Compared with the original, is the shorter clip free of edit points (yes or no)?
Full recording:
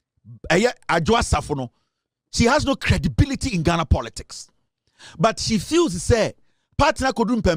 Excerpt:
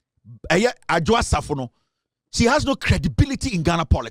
yes